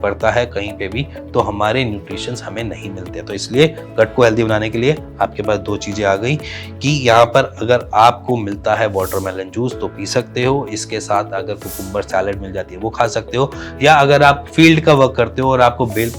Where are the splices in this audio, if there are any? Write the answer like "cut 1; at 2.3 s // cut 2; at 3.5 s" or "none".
none